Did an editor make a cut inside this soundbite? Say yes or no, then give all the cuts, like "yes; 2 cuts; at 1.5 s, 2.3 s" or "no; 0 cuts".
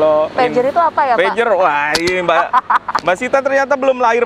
no; 0 cuts